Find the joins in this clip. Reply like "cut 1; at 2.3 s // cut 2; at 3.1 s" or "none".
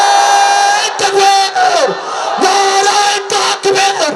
none